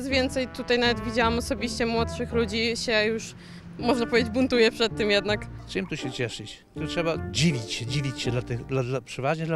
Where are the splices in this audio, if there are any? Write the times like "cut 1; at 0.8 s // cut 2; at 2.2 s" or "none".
cut 1; at 5.6 s // cut 2; at 6.8 s